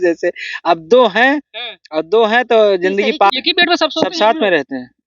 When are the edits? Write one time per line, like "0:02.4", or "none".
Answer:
0:03.3